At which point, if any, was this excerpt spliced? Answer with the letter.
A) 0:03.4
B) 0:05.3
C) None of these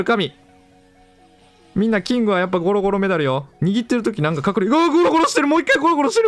C